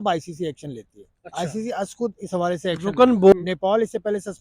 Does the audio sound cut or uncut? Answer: cut